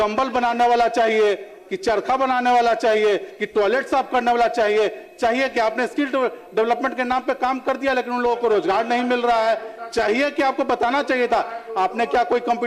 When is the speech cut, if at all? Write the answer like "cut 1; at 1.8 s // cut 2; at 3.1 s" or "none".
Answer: none